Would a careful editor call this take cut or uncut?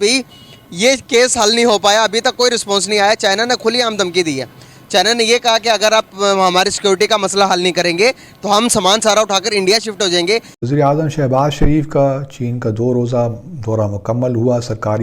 cut